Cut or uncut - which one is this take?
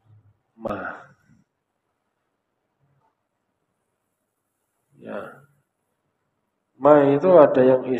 uncut